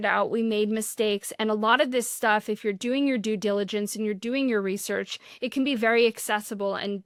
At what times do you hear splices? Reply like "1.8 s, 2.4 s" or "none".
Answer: none